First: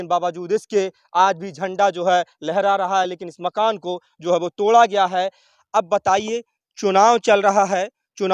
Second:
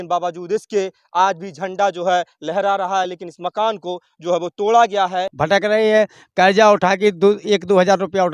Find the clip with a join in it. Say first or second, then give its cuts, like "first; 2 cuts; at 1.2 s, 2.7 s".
second; 1 cut; at 5.3 s